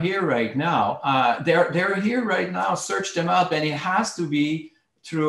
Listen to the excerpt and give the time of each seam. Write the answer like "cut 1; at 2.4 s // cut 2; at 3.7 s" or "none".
cut 1; at 1.0 s

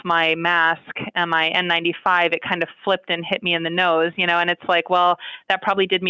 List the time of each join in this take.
none

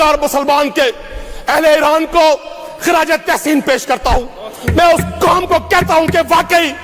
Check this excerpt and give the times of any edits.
none

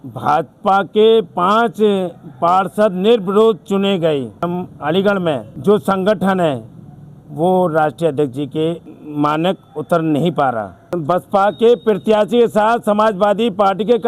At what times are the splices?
cut 1; at 4.5 s // cut 2; at 5.5 s // cut 3; at 8.9 s // cut 4; at 10.9 s

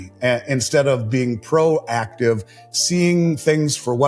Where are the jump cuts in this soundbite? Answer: none

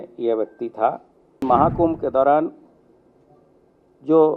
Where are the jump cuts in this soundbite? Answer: cut 1; at 1.4 s

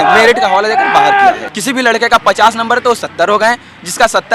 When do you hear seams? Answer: cut 1; at 1.5 s

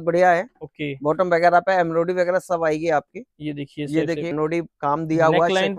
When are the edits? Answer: cut 1; at 4.3 s

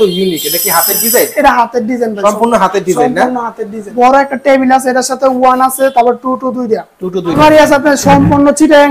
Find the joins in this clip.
cut 1; at 3.9 s // cut 2; at 7.4 s

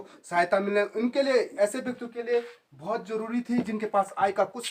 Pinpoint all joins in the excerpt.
none

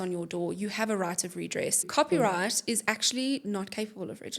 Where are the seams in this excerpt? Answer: cut 1; at 1.9 s

